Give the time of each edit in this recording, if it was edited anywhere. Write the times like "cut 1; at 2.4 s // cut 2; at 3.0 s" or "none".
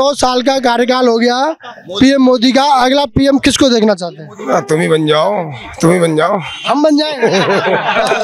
none